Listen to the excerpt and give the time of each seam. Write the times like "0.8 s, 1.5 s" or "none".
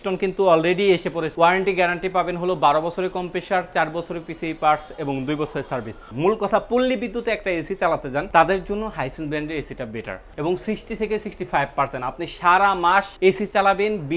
1.3 s, 6.1 s, 8.3 s, 10.2 s, 13.1 s